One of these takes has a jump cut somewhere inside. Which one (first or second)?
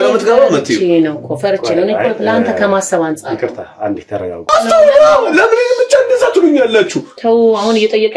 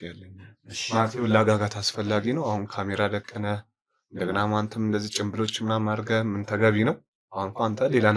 first